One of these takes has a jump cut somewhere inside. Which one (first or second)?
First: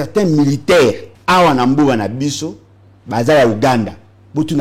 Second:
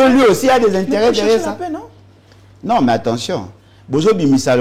first